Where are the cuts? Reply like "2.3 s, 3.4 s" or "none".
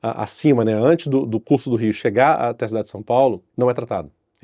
3.5 s